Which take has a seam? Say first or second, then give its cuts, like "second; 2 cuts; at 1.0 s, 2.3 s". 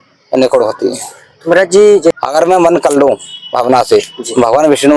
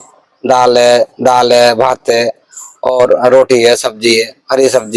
first; 1 cut; at 2.2 s